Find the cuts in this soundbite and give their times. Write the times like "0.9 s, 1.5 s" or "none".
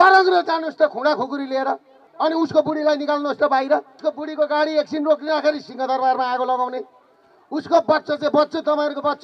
2.1 s, 3.9 s